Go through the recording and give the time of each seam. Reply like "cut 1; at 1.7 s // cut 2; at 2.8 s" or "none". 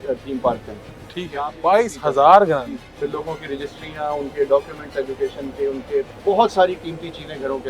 cut 1; at 2.8 s // cut 2; at 6.1 s